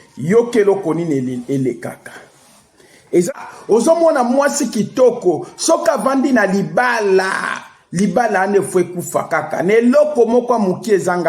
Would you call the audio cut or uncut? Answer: cut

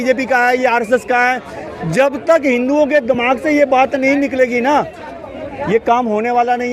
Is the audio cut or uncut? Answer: uncut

